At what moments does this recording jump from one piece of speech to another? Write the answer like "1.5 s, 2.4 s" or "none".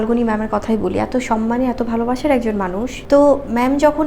3.0 s